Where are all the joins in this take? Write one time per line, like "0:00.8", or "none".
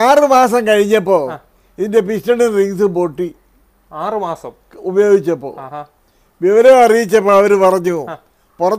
none